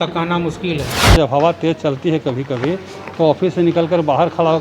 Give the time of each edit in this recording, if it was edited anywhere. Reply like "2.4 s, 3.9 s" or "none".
1.2 s